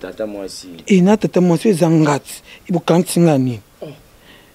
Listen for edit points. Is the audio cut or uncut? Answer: uncut